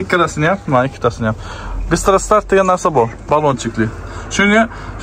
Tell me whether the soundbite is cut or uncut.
uncut